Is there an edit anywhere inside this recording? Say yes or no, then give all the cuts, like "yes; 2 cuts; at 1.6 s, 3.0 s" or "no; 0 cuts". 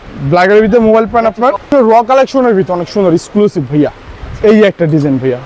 yes; 1 cut; at 1.6 s